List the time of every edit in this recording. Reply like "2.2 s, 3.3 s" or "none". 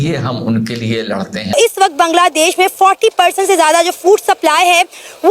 1.5 s

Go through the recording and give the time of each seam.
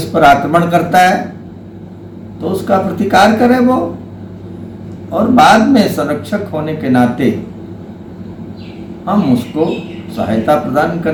none

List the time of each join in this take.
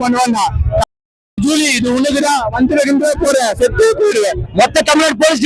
4.4 s

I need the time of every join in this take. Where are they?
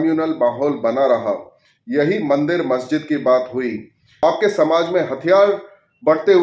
4.2 s

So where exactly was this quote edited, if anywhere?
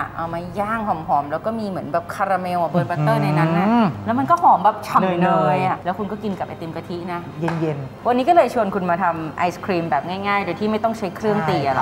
4.0 s, 7.9 s

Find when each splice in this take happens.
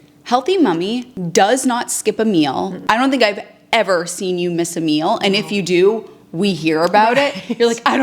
1.1 s, 2.8 s

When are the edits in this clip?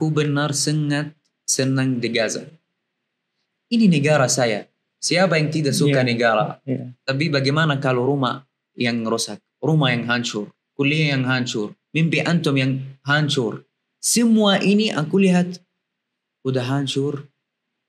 7.1 s

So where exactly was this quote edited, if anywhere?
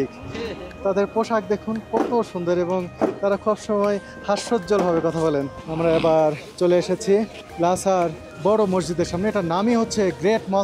5.6 s, 7.4 s, 8.3 s

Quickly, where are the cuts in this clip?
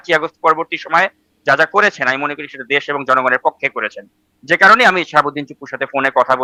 none

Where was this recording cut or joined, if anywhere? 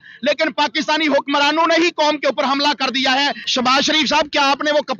3.4 s

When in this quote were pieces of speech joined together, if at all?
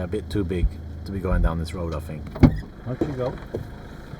none

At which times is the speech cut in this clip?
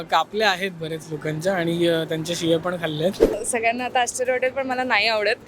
3.4 s

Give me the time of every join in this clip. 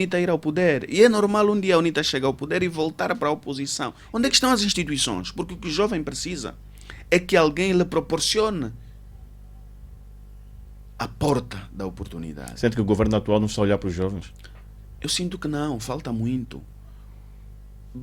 4.0 s

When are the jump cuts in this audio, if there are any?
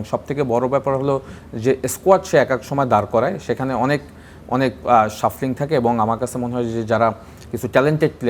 none

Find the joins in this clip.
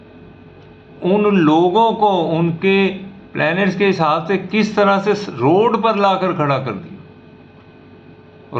none

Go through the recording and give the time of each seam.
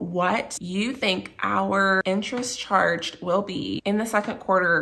2.0 s, 3.8 s

